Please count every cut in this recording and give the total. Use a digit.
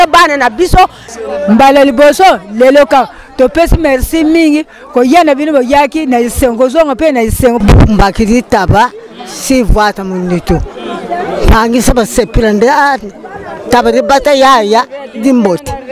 0